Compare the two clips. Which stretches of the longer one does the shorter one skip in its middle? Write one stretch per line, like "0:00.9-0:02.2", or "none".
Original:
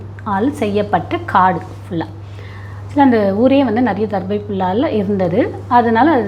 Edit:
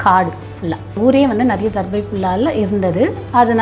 0:02.3-0:03.3